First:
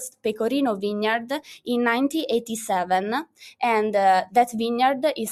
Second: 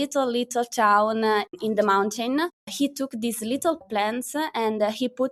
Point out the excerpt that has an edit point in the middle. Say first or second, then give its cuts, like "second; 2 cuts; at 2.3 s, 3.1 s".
second; 3 cuts; at 1.5 s, 2.6 s, 3.8 s